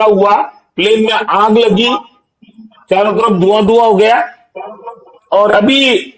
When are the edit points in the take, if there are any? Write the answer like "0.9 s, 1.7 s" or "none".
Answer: none